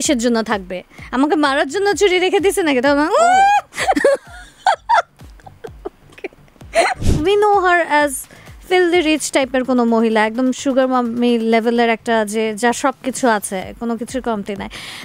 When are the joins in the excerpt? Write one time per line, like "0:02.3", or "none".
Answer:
0:07.1